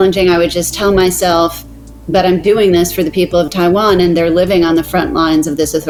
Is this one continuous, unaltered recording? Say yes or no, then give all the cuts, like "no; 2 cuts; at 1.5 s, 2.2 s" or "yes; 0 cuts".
yes; 0 cuts